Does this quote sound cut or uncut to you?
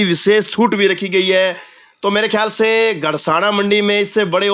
uncut